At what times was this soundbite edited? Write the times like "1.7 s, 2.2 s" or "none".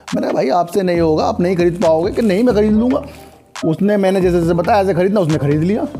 none